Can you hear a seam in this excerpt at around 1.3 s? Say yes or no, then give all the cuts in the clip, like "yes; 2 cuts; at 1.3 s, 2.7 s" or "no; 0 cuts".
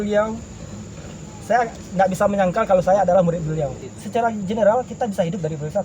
no; 1 cut; at 3.8 s